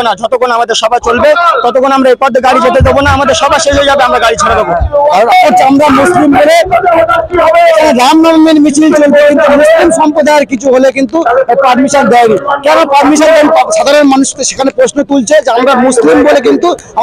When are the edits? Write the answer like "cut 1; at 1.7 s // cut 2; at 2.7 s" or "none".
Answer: cut 1; at 5.3 s